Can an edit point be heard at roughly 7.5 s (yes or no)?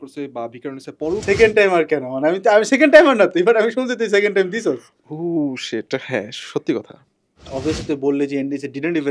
yes